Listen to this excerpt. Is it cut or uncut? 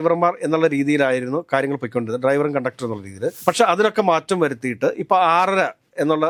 uncut